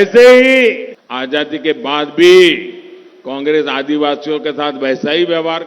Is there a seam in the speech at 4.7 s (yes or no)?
no